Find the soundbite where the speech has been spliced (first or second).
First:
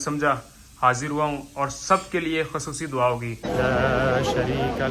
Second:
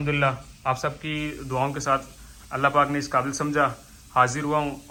first